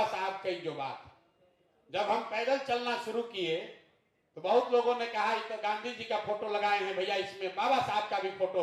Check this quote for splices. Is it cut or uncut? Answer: uncut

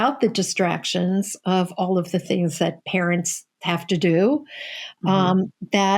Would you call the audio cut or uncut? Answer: uncut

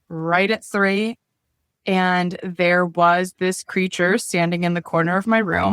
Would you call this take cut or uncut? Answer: uncut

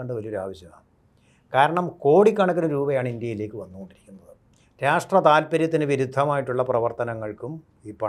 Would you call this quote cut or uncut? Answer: uncut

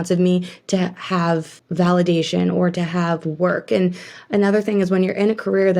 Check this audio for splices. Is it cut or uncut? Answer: cut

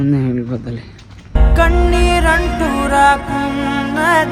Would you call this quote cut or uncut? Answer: uncut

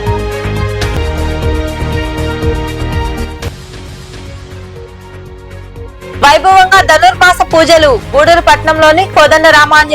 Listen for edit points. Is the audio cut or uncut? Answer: cut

